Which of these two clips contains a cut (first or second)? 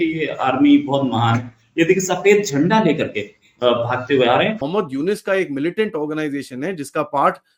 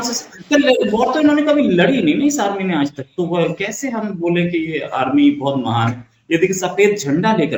first